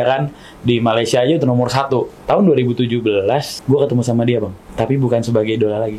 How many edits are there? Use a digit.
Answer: 3